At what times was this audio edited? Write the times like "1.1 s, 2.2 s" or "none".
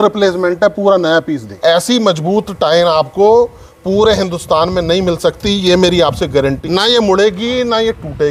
1.5 s, 6.6 s